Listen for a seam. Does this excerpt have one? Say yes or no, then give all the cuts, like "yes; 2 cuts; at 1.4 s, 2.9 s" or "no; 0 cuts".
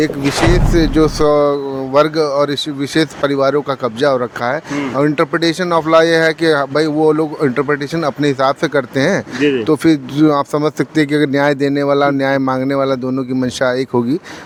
no; 0 cuts